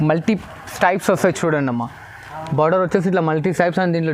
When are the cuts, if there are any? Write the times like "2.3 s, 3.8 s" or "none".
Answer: none